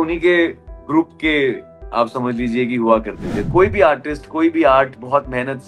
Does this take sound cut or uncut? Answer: cut